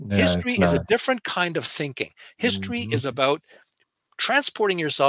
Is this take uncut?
yes; 0 cuts

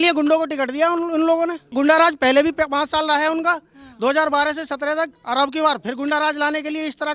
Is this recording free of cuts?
no; 1 cut; at 1.7 s

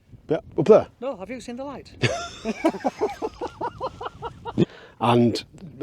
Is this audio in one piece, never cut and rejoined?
no; 1 cut; at 4.6 s

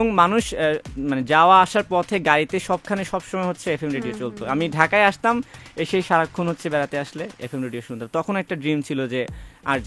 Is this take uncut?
yes; 0 cuts

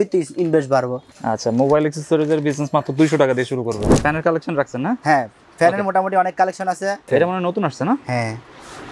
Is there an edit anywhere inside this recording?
yes; 3 cuts; at 1.1 s, 4.0 s, 7.1 s

